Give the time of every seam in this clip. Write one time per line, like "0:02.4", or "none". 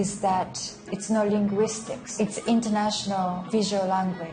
0:00.9
0:03.4